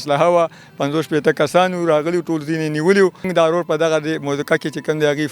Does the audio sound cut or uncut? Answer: cut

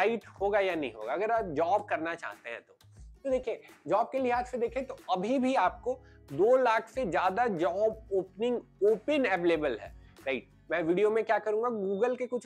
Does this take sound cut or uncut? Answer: uncut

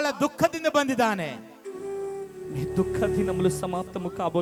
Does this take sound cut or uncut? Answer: uncut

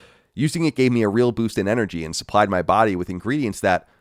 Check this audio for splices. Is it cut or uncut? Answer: uncut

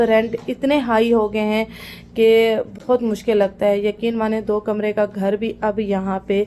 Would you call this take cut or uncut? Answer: uncut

